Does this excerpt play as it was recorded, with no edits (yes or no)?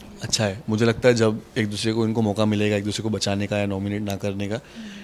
yes